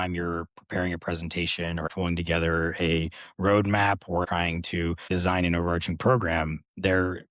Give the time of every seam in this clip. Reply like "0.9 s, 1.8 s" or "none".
1.9 s, 4.4 s